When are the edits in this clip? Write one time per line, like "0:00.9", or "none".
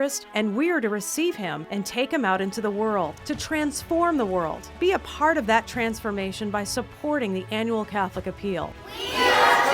0:04.6
0:08.8